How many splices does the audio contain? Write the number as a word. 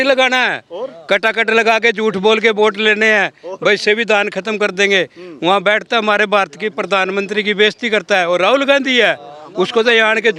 zero